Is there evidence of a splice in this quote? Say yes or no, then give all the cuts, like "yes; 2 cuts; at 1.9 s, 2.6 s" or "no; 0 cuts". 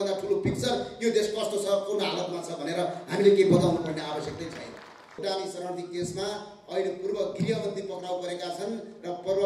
yes; 1 cut; at 5.2 s